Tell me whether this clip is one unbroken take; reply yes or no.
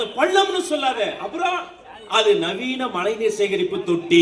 yes